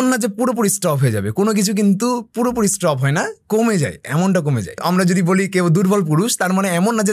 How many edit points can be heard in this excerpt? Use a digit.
1